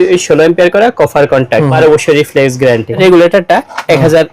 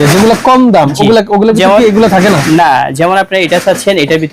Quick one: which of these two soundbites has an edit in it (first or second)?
first